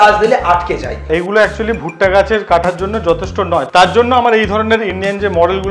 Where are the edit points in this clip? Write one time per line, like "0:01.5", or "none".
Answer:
0:01.0
0:03.7